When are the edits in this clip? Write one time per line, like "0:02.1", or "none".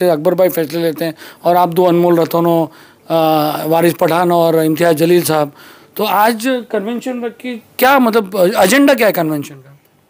none